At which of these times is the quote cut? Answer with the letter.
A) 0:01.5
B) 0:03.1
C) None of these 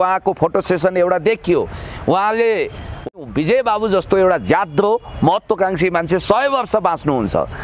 B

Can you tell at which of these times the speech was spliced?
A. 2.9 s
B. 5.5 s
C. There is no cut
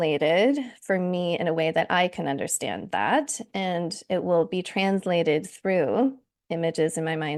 C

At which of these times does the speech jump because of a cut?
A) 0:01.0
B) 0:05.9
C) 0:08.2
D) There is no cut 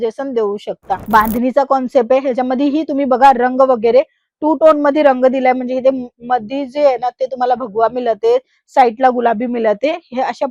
A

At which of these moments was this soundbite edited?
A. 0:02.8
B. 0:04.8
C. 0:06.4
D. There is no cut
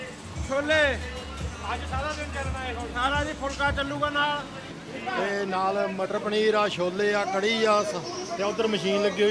B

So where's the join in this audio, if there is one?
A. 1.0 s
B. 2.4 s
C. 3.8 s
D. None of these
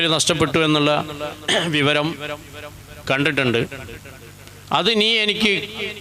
D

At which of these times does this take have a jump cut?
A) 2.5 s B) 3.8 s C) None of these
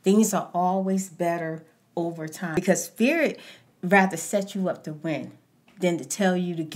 A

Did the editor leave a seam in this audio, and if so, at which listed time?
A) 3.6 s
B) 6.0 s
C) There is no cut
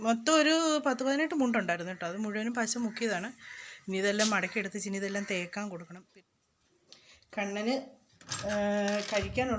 B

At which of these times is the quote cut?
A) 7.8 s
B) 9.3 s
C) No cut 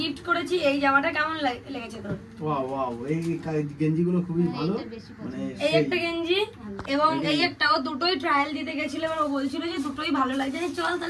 C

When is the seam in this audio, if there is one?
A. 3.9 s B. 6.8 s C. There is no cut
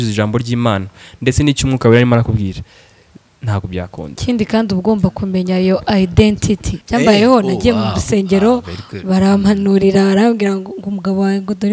B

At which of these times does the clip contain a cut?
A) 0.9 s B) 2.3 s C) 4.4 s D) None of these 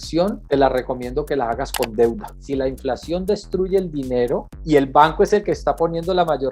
B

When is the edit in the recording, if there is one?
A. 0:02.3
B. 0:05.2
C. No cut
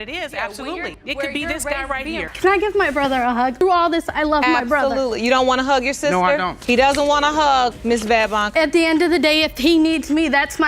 A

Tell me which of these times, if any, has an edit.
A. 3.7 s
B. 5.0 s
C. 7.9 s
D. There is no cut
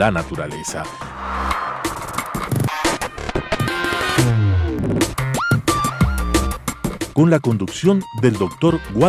B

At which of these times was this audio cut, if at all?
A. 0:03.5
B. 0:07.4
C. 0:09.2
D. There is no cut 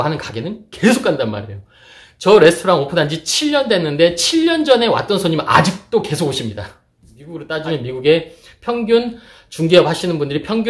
B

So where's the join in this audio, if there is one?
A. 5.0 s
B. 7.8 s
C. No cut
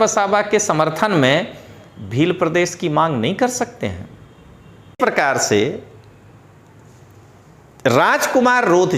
A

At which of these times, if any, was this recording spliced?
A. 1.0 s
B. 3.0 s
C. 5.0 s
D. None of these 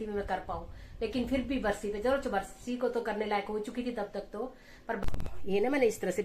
C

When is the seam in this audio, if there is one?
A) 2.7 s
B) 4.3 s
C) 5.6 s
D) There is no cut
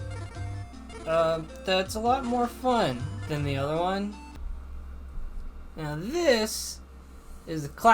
B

